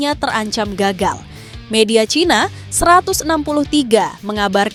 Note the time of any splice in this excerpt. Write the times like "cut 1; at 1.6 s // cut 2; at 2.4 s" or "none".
none